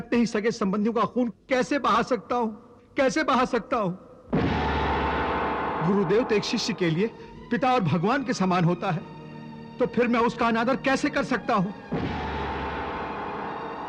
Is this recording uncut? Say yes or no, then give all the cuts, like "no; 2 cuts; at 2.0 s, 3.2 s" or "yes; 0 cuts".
yes; 0 cuts